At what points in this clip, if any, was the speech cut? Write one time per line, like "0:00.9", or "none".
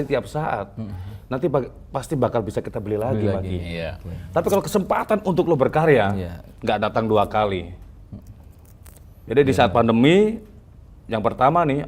none